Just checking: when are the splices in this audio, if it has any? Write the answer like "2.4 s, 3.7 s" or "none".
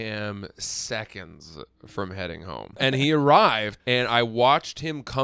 2.8 s, 3.7 s